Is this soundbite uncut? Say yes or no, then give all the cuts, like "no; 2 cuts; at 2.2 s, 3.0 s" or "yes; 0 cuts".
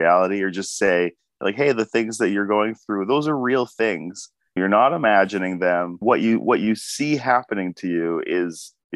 no; 2 cuts; at 4.6 s, 5.9 s